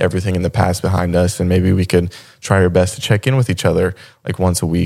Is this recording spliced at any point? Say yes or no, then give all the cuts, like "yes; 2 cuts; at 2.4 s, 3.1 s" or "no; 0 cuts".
no; 0 cuts